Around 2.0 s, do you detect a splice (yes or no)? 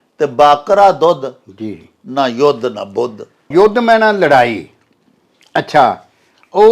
no